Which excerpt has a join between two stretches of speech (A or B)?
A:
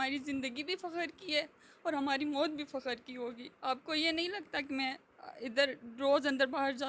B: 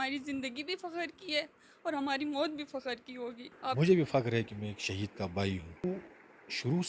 B